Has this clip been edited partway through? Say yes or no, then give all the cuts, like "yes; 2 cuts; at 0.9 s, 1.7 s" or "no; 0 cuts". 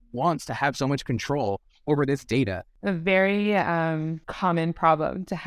yes; 2 cuts; at 2.7 s, 4.2 s